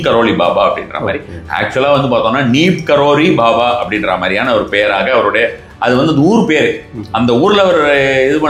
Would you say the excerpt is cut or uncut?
uncut